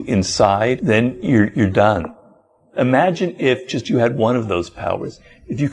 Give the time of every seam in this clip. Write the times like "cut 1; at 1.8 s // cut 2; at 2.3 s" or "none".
cut 1; at 0.8 s // cut 2; at 2.5 s